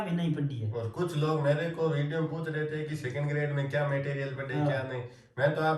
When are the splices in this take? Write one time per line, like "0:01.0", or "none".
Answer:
none